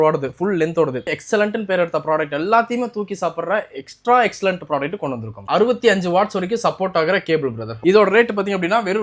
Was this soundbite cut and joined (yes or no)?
yes